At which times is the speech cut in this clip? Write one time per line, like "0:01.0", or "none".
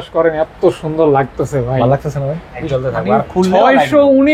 0:02.7